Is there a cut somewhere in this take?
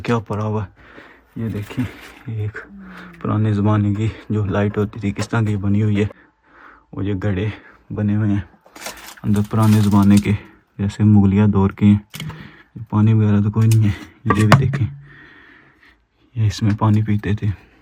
no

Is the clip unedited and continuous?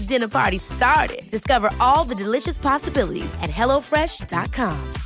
yes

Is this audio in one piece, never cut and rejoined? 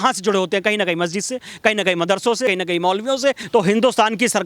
no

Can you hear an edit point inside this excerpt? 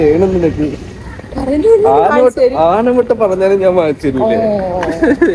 no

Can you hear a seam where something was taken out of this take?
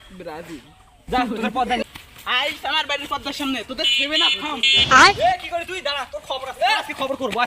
yes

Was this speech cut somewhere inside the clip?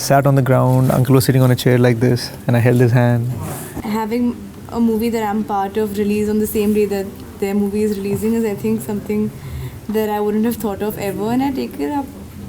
yes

